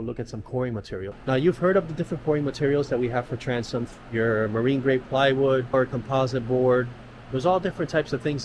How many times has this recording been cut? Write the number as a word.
three